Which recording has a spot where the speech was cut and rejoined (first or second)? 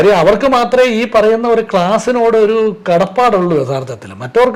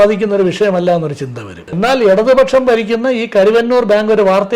second